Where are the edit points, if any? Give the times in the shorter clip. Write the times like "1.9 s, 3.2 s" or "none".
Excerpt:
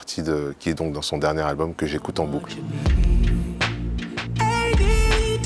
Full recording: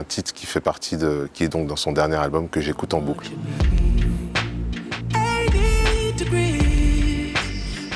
none